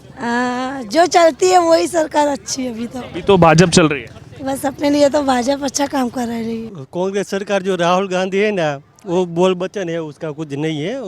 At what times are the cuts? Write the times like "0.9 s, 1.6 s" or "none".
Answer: 6.8 s